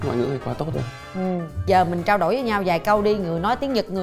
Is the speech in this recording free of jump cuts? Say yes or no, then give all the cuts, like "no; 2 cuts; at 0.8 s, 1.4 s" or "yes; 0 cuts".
no; 1 cut; at 1.6 s